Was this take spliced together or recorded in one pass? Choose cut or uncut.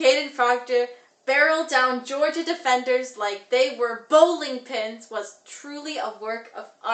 uncut